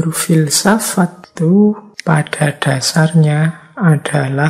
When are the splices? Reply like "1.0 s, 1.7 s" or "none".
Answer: 1.2 s, 1.9 s